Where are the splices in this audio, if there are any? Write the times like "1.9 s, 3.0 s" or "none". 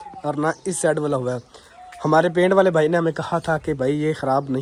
none